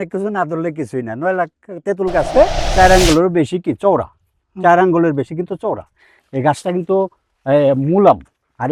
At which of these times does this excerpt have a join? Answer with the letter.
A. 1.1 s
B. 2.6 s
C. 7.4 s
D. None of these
B